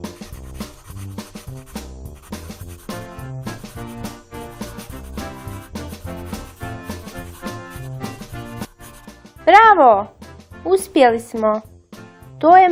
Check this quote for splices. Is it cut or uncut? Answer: cut